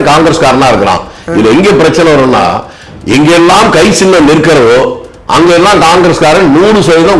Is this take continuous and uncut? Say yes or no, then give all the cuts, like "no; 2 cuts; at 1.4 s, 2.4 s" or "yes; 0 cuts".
yes; 0 cuts